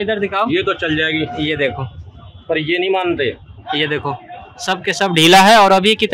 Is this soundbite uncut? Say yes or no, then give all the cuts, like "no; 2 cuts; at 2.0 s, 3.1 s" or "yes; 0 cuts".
yes; 0 cuts